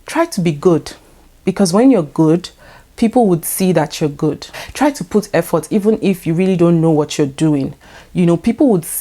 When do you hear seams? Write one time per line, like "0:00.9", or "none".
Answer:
0:04.6